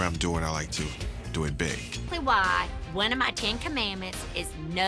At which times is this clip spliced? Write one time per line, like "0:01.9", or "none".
0:01.9